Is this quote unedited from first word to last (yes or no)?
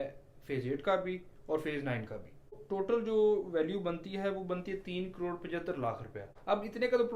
no